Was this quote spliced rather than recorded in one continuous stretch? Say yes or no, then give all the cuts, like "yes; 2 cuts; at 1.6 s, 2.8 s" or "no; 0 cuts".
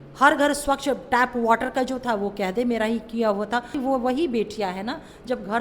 yes; 1 cut; at 3.8 s